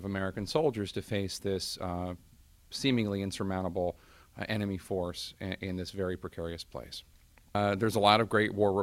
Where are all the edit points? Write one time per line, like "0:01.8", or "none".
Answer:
none